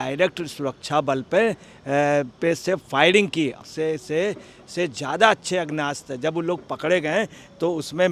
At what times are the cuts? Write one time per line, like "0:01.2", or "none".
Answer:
0:03.6